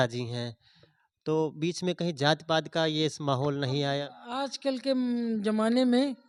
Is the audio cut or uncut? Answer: uncut